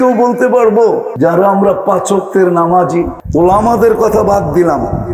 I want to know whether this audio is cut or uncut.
cut